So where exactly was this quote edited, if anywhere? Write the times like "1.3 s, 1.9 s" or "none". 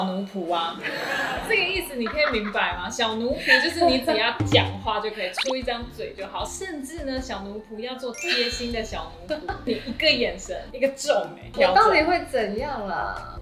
none